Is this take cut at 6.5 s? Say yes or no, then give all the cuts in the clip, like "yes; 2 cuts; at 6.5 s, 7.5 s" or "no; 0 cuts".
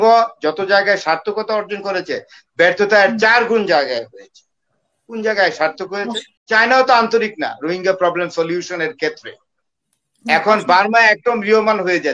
yes; 1 cut; at 6.5 s